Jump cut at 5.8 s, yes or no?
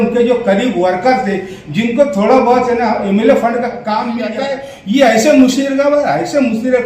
no